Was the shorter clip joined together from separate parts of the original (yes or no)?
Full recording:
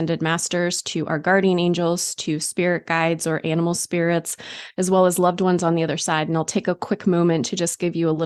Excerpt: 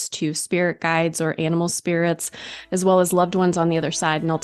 no